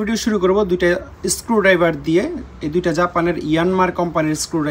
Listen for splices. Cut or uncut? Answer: uncut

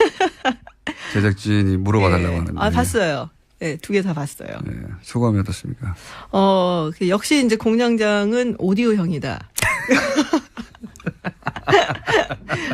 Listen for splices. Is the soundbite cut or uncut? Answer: cut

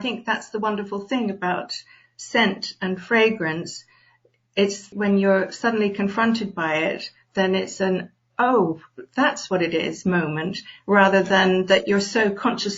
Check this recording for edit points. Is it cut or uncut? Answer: cut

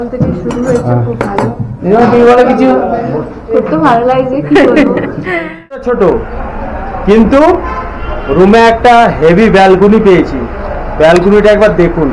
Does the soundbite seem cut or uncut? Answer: cut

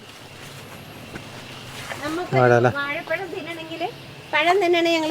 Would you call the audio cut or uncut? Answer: uncut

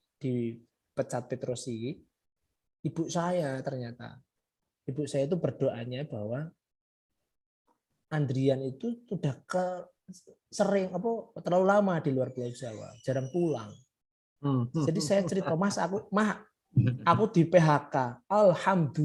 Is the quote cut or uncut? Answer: uncut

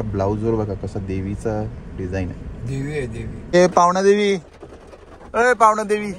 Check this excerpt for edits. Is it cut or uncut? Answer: cut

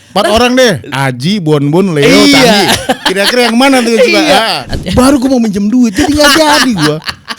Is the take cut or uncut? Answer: cut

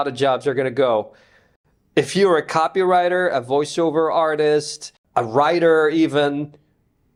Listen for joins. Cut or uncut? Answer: uncut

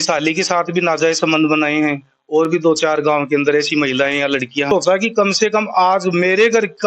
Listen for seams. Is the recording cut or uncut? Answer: cut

